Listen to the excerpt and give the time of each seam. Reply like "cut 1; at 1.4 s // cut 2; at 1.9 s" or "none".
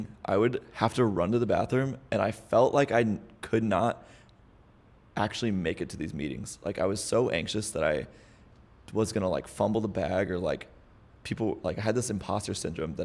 none

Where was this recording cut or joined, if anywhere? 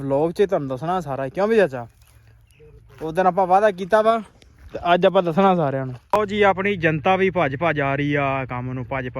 cut 1; at 5.9 s

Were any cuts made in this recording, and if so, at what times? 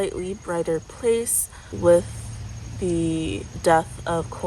cut 1; at 1.8 s

